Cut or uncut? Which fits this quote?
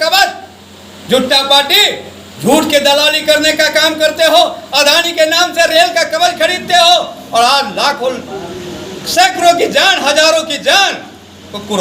uncut